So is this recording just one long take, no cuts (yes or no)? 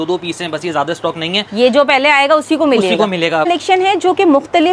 no